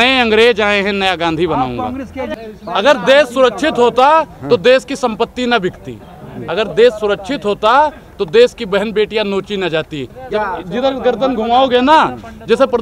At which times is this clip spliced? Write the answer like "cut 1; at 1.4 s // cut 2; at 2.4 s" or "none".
cut 1; at 2.3 s // cut 2; at 10.1 s